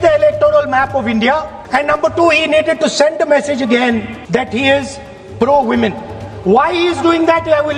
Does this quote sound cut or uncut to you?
cut